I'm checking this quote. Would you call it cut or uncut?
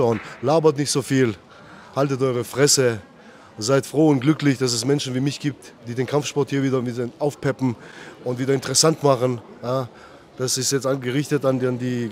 uncut